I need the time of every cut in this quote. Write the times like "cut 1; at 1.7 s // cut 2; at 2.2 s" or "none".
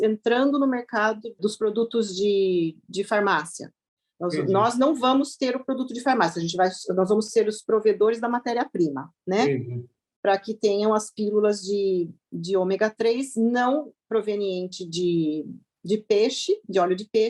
cut 1; at 1.4 s